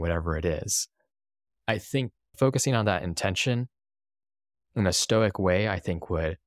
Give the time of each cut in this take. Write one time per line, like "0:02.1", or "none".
0:04.6